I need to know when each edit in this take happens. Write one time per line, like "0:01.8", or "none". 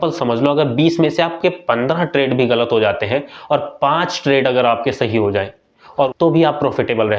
0:06.1

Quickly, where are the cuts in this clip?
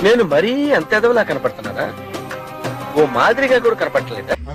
none

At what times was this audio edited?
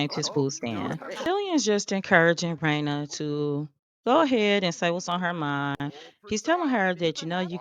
0:01.1

